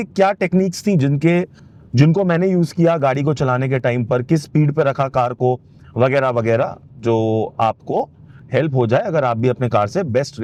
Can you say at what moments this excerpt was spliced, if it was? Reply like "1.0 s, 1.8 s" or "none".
none